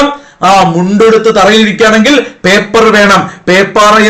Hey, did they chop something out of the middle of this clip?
no; 0 cuts

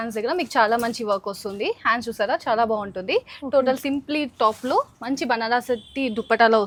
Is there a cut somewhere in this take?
no; 0 cuts

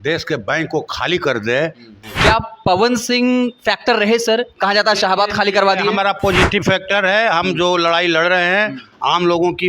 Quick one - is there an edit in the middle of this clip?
yes; 1 cut; at 1.9 s

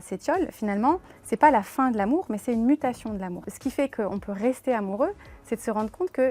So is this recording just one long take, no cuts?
no; 1 cut; at 3.5 s

